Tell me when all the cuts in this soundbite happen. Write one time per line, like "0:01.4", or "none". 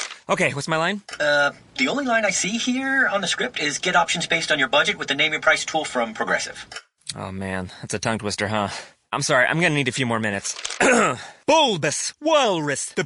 none